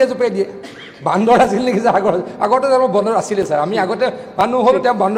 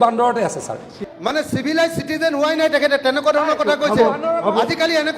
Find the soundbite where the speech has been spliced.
second; 1 cut; at 1.0 s

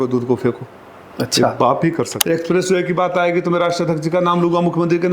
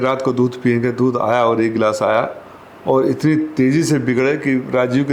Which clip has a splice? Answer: first; 1 cut; at 2.2 s

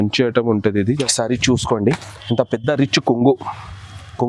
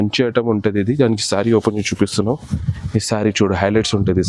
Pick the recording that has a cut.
first; 1 cut; at 1.0 s

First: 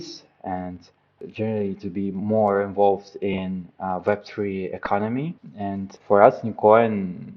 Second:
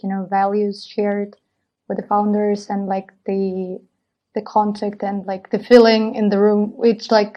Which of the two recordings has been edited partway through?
first; 2 cuts; at 1.1 s, 5.9 s

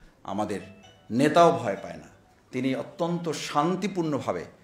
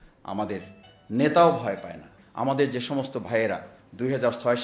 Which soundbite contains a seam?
second; 1 cut; at 2.2 s

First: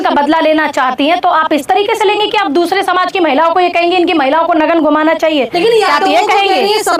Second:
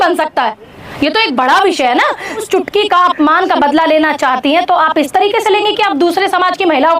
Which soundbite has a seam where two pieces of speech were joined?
second; 1 cut; at 2.4 s

